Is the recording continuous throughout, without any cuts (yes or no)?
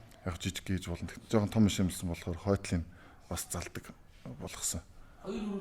no